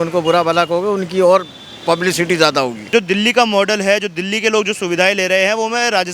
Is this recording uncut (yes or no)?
no